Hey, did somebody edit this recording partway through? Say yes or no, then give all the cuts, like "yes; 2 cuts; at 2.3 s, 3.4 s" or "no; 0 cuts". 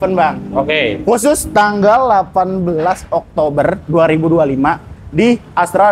no; 0 cuts